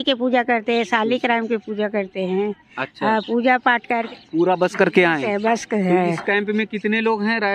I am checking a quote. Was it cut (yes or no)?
yes